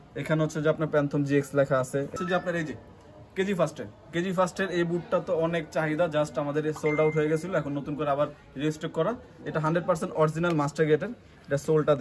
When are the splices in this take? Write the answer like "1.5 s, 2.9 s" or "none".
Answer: 2.2 s